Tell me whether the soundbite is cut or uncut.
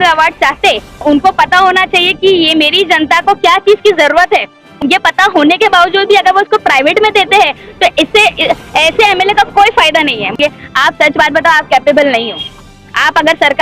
cut